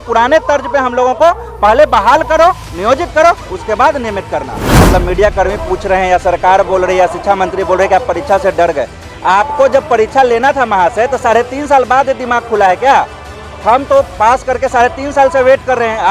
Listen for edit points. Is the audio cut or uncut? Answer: cut